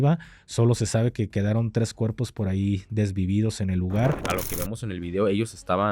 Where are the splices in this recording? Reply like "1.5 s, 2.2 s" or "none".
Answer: 4.2 s